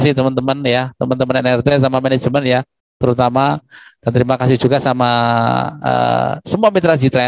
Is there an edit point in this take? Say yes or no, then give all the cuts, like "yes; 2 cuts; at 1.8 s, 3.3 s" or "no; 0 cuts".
no; 0 cuts